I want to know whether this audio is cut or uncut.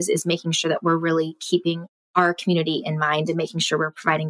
cut